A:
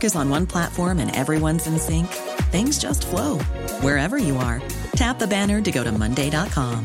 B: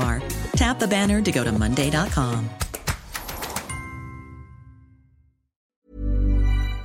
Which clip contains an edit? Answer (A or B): B